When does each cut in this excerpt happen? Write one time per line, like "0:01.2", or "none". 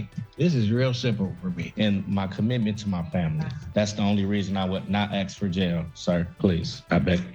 0:01.7
0:06.3

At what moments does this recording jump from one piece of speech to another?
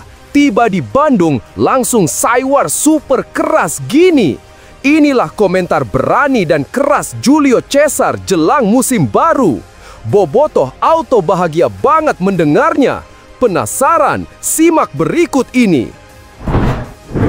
0:16.1

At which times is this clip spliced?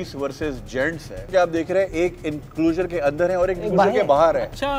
0:01.3

